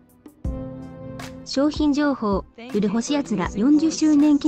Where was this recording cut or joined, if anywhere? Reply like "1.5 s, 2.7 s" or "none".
1.5 s